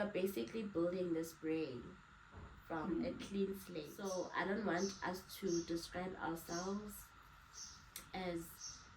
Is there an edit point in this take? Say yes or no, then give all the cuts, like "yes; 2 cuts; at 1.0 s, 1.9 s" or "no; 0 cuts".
yes; 1 cut; at 3.9 s